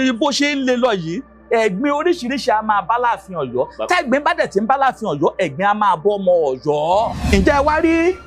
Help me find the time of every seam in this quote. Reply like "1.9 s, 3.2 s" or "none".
7.2 s